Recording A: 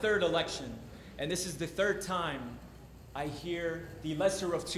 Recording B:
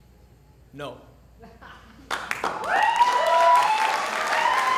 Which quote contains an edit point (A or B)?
B